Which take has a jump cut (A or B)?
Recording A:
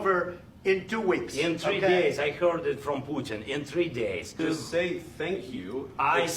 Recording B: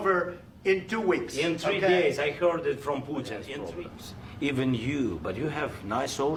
A